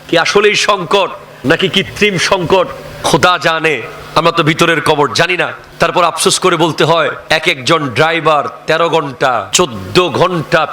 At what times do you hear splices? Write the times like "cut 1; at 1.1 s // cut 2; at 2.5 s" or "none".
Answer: cut 1; at 1.3 s // cut 2; at 2.9 s // cut 3; at 3.9 s // cut 4; at 5.6 s // cut 5; at 7.2 s // cut 6; at 9.5 s